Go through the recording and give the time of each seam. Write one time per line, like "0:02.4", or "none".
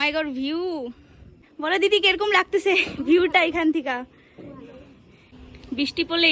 none